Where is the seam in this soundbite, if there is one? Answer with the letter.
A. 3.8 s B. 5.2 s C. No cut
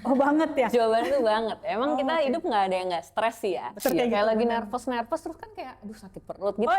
A